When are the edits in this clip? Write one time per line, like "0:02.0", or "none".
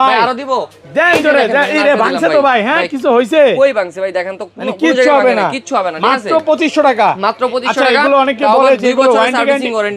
none